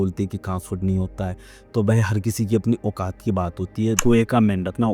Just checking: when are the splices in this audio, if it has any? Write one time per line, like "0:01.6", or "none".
0:04.0